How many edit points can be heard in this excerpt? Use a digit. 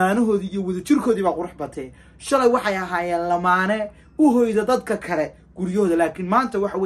0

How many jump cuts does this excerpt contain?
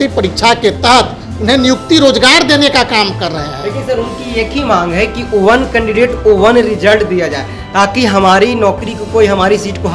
0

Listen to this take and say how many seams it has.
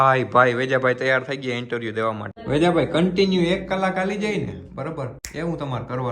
2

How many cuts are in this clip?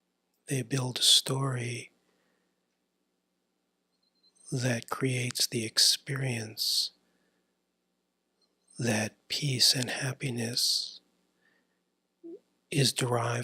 0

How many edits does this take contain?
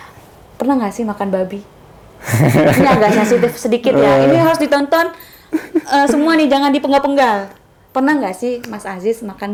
0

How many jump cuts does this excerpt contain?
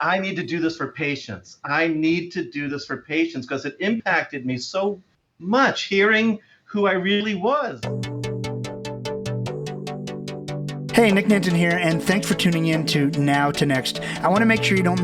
1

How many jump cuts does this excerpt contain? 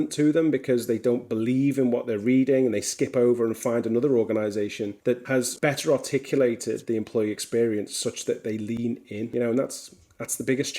2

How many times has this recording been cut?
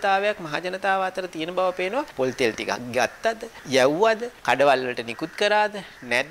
3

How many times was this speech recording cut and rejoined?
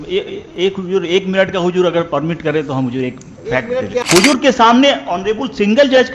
1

